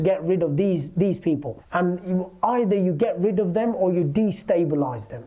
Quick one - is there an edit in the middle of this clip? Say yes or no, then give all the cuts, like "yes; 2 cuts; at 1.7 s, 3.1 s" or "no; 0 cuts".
no; 0 cuts